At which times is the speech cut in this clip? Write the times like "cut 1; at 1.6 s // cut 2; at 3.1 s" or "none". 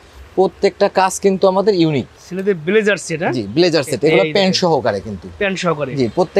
cut 1; at 2.1 s